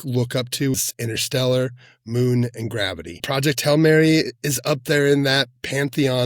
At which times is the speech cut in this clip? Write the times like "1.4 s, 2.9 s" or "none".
0.7 s, 3.3 s